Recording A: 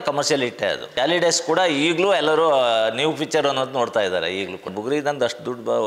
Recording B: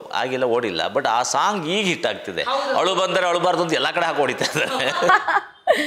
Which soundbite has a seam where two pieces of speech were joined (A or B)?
A